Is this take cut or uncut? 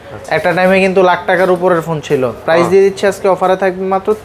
uncut